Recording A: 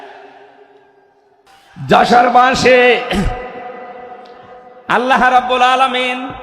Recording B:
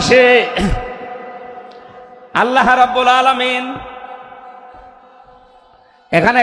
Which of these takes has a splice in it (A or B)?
A